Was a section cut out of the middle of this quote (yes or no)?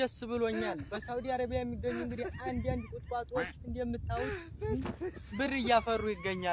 no